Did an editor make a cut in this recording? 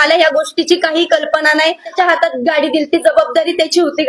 yes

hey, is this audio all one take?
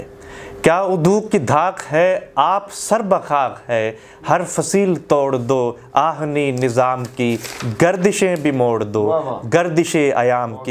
yes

